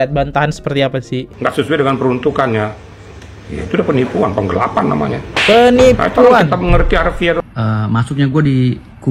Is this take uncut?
no; 2 cuts; at 1.2 s, 7.4 s

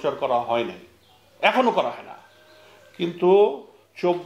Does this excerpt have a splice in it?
no; 0 cuts

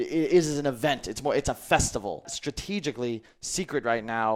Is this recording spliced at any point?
yes; 1 cut; at 2.3 s

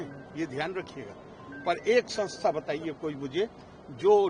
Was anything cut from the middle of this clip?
no; 0 cuts

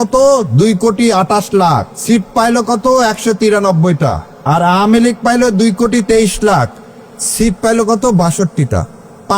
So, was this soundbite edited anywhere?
yes; 2 cuts; at 1.9 s, 4.3 s

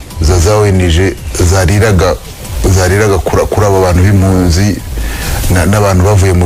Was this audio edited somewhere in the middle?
no; 0 cuts

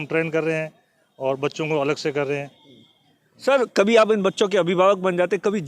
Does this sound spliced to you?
no; 0 cuts

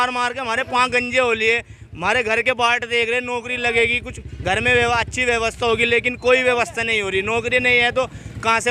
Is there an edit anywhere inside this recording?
no; 0 cuts

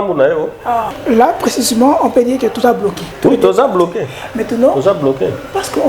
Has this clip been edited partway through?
yes; 2 cuts; at 0.9 s, 3.1 s

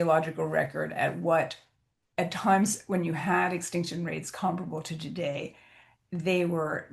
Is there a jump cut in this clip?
no; 0 cuts

